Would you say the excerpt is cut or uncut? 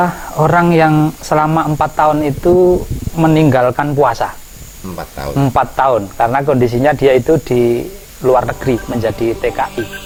uncut